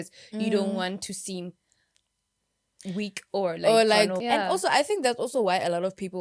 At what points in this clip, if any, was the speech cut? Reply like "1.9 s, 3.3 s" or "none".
4.2 s